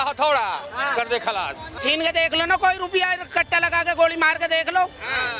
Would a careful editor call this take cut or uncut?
cut